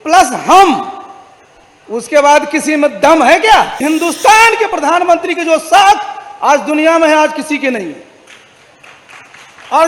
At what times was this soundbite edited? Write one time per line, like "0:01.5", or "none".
0:03.8